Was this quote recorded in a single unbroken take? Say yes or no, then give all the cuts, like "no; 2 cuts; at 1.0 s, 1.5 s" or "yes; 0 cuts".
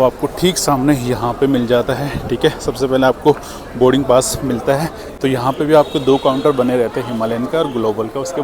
yes; 0 cuts